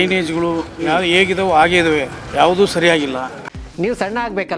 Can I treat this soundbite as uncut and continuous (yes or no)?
no